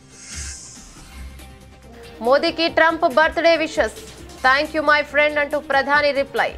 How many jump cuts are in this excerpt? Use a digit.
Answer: 1